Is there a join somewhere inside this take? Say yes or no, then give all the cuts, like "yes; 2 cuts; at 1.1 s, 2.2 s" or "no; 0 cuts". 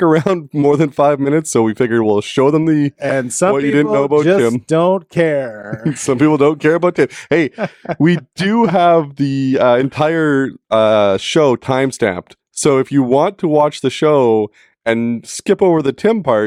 no; 0 cuts